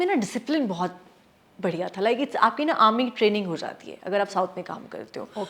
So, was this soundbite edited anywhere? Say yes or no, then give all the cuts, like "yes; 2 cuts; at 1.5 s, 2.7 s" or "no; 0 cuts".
no; 0 cuts